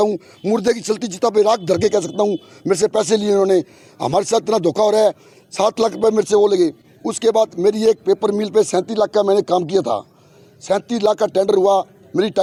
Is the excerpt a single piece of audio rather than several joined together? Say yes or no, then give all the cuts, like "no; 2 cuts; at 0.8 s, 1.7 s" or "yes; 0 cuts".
yes; 0 cuts